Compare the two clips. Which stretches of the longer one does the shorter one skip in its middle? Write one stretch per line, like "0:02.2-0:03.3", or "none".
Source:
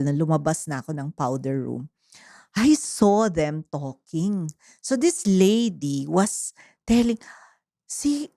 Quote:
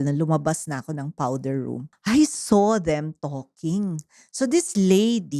0:01.9-0:02.4